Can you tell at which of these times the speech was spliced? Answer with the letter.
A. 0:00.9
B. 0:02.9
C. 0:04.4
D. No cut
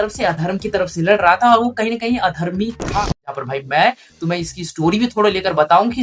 B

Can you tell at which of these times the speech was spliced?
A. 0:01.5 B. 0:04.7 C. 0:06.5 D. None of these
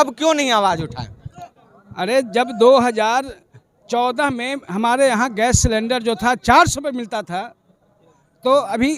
D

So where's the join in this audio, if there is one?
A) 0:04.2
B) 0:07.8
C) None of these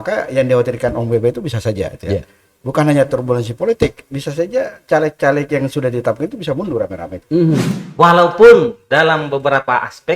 B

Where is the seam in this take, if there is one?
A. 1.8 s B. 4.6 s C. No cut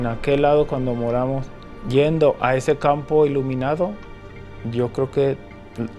A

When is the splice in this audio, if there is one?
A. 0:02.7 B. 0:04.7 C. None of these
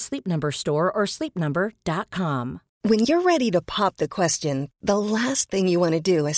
A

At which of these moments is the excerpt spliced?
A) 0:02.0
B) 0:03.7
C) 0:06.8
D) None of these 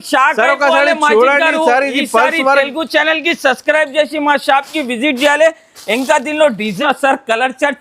C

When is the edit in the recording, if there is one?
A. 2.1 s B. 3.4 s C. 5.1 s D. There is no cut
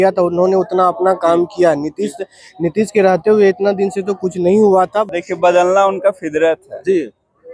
C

